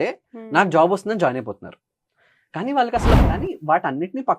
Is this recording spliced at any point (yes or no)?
yes